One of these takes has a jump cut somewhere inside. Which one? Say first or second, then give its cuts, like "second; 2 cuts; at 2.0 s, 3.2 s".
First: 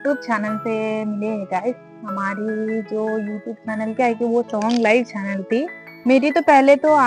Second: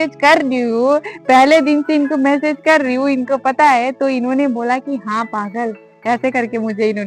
first; 1 cut; at 5.9 s